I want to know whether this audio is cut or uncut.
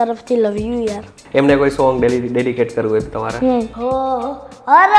cut